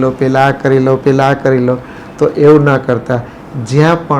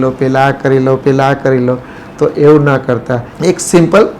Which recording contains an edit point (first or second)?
second